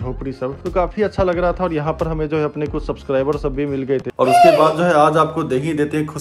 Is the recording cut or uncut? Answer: cut